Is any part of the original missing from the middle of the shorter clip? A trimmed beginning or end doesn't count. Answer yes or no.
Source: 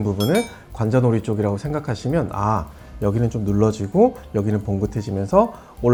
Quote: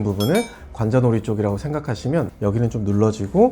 yes